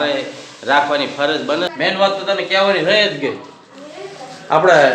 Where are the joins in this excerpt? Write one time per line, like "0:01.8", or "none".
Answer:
0:01.7